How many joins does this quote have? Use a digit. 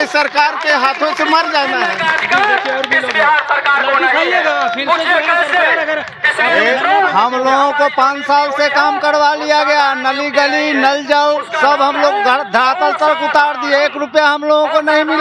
0